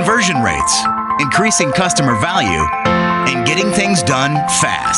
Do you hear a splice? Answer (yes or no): no